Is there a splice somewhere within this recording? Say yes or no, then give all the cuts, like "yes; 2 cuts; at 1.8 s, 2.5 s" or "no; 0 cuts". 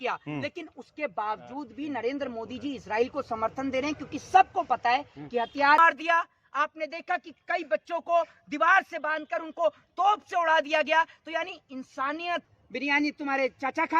yes; 2 cuts; at 5.8 s, 12.5 s